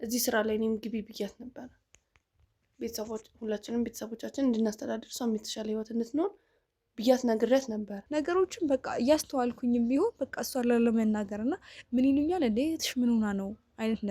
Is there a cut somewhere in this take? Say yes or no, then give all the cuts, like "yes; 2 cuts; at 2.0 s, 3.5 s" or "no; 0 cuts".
yes; 1 cut; at 8.0 s